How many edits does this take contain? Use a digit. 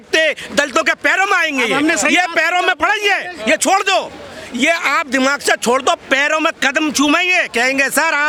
0